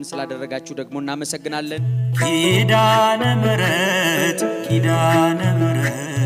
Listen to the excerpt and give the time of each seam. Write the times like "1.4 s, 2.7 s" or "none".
1.9 s